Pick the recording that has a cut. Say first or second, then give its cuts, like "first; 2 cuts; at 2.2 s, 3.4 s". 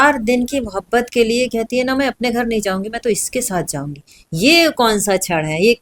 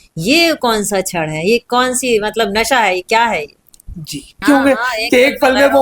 second; 1 cut; at 4.4 s